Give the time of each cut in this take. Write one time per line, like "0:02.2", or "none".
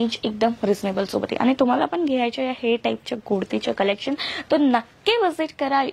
none